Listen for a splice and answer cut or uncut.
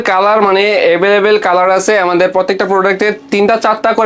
uncut